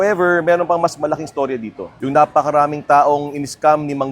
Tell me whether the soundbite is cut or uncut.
cut